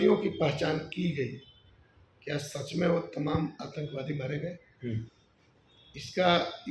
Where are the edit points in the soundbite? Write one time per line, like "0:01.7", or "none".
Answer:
none

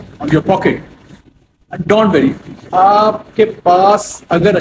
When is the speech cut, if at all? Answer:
none

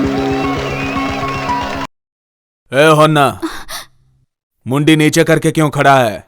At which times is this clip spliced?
0:01.9

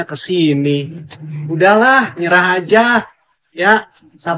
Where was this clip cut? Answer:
none

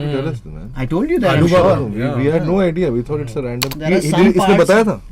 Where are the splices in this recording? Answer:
0:03.6

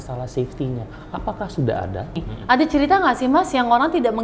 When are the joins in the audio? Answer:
0:02.3

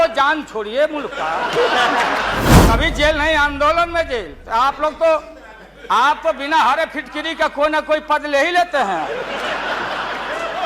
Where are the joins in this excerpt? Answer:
0:02.6

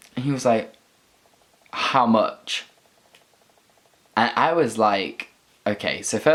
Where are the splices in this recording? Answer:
none

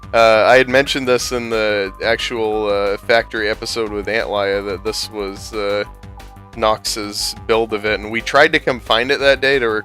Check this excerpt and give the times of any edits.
0:08.6

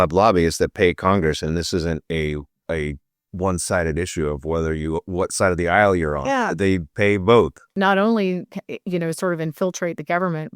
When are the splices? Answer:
0:07.7

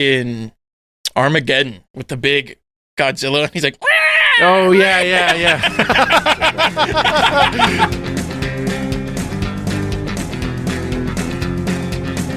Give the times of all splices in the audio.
0:07.9

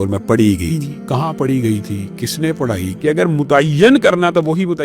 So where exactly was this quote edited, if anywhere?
0:02.9

